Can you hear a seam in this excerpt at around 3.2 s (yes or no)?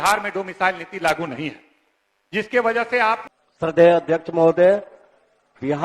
yes